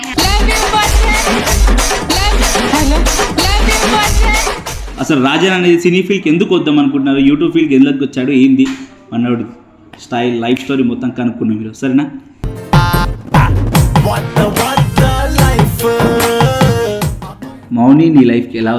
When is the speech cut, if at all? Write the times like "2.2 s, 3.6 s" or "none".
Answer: 4.9 s, 17.6 s

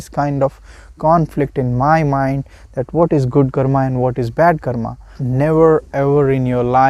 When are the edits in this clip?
5.1 s

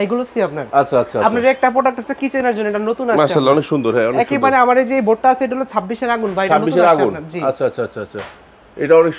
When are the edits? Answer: none

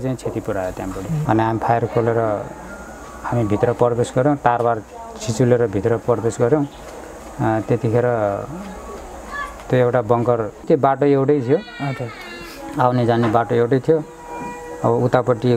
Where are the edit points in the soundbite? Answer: 1.1 s, 10.6 s

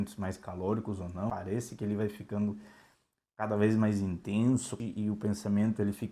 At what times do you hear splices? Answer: 1.3 s, 4.7 s

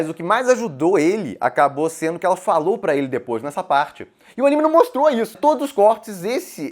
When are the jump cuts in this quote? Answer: 5.4 s

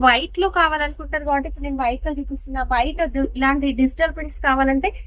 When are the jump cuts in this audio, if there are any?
none

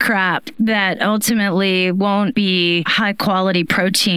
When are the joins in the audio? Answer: 2.5 s

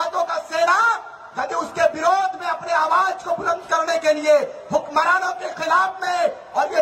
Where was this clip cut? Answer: none

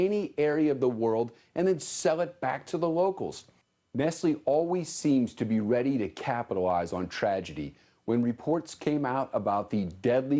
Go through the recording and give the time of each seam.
2.7 s

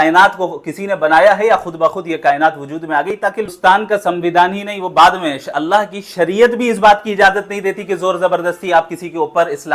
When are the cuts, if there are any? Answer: 3.5 s

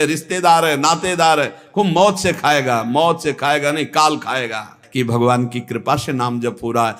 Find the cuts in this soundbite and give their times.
4.8 s

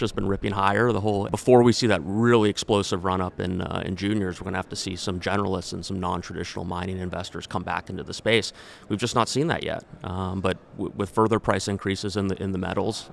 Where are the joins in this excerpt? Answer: 1.3 s

